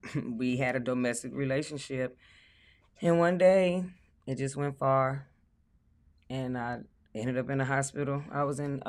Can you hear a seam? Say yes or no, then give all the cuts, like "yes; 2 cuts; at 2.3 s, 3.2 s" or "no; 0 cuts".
no; 0 cuts